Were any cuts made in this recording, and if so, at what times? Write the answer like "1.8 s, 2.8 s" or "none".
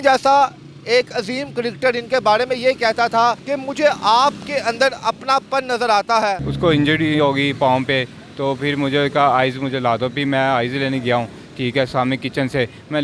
3.5 s, 6.5 s